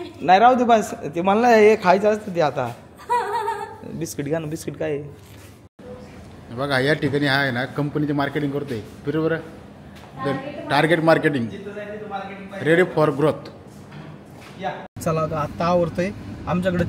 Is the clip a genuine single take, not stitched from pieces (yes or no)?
no